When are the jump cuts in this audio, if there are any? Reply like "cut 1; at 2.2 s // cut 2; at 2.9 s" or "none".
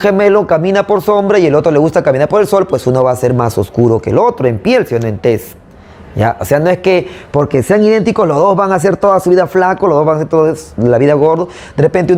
none